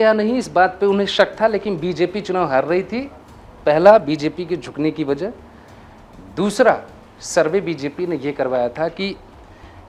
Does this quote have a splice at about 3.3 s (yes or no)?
no